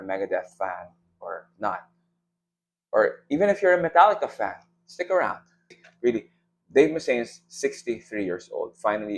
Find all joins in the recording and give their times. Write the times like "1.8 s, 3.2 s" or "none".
5.9 s